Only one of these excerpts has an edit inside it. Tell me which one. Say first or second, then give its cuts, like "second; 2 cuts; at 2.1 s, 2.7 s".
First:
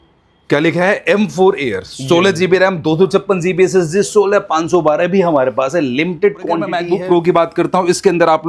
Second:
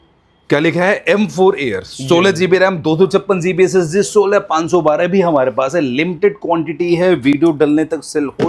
first; 1 cut; at 6.8 s